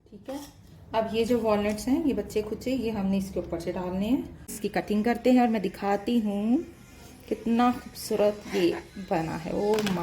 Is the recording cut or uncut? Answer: cut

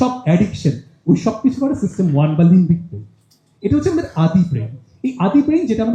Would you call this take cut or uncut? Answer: uncut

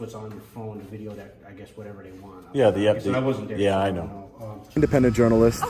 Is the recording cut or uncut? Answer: cut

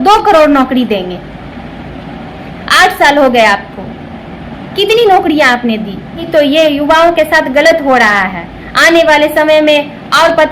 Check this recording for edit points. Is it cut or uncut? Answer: cut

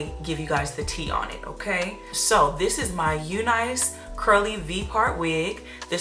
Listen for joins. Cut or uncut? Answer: cut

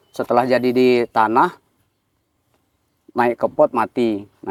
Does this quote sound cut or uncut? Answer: uncut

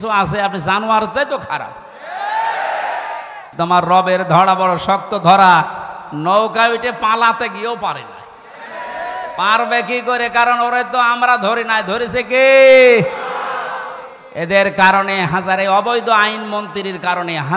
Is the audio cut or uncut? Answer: cut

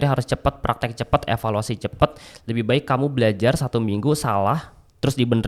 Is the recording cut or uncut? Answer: uncut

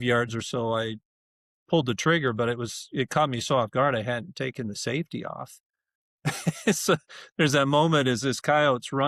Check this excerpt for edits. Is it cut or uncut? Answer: uncut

